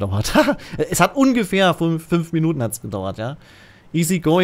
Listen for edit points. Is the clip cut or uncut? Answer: uncut